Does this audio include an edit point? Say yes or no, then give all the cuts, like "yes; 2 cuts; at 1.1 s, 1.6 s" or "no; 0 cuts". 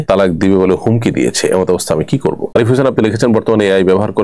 yes; 1 cut; at 2.4 s